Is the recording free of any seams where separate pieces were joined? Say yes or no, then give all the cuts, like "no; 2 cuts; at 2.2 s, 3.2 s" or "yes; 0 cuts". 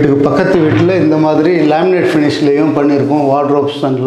yes; 0 cuts